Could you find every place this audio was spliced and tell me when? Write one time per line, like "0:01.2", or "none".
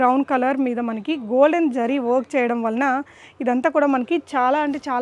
none